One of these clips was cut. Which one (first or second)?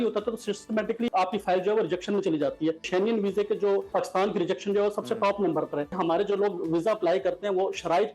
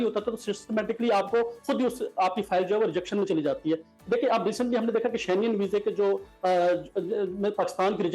first